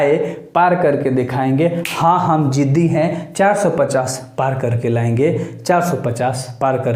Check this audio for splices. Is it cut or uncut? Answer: uncut